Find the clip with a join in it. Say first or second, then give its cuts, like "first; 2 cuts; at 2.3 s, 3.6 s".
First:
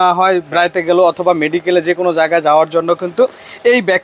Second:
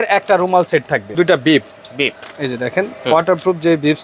second; 1 cut; at 1.1 s